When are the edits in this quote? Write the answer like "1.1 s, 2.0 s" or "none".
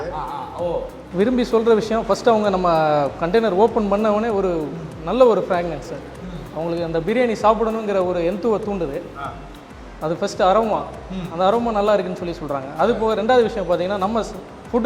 1.0 s